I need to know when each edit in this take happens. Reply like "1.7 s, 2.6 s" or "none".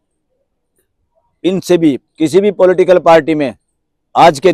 2.0 s